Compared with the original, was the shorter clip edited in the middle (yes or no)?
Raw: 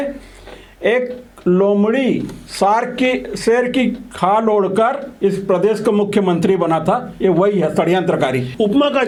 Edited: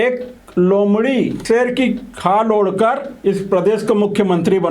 yes